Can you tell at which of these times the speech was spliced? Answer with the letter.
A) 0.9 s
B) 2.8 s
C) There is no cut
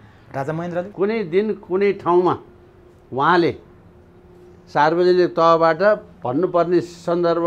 A